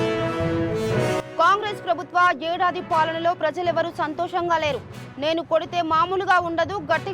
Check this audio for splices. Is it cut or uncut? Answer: cut